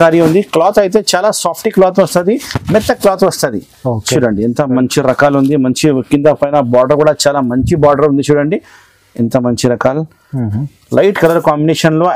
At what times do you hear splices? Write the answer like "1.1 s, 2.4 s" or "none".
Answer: none